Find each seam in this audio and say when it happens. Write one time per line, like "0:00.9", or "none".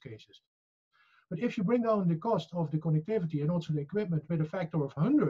none